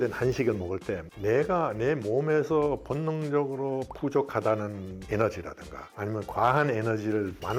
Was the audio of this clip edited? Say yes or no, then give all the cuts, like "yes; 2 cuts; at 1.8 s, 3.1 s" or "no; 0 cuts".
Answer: no; 0 cuts